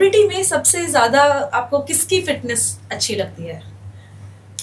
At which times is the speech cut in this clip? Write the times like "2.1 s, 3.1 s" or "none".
none